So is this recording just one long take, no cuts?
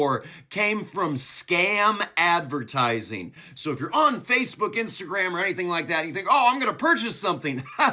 yes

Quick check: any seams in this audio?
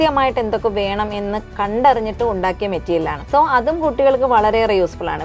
yes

